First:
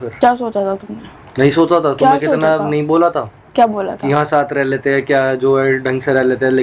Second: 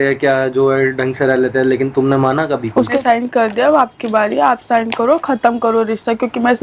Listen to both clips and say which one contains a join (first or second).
second